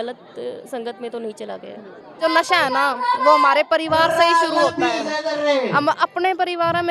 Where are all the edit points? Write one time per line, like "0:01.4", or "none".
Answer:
0:02.1